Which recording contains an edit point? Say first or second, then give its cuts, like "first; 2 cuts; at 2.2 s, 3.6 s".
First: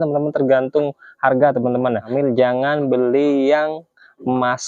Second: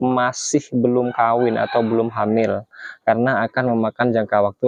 first; 1 cut; at 2.1 s